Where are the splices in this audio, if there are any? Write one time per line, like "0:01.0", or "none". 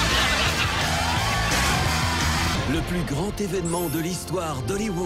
0:02.5